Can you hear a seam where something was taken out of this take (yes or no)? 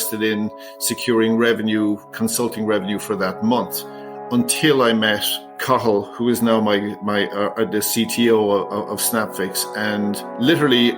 no